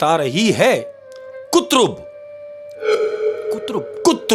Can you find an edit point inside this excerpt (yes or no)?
no